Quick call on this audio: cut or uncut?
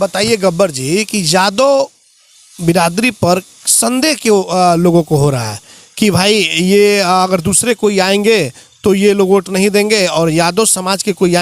uncut